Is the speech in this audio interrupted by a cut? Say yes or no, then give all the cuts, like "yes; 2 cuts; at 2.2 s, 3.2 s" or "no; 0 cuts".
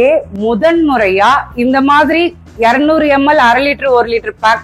no; 0 cuts